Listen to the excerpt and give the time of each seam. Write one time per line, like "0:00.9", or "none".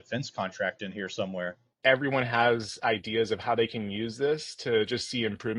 0:01.8